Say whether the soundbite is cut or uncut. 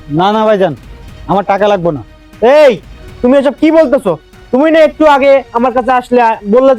uncut